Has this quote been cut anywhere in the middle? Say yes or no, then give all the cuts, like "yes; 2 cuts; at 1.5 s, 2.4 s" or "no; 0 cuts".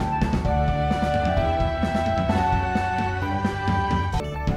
yes; 1 cut; at 3.3 s